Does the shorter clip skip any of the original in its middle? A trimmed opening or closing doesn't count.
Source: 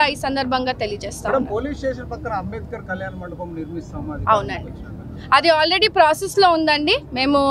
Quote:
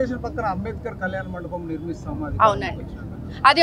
no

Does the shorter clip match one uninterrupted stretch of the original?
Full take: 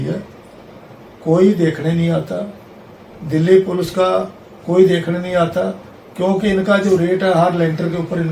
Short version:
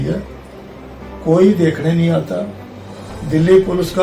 yes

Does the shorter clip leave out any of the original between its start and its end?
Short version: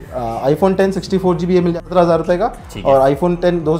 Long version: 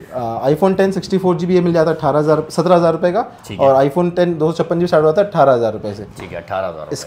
yes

